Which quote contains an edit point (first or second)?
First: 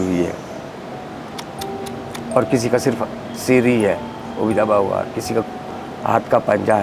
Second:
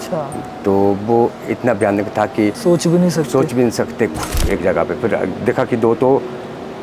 second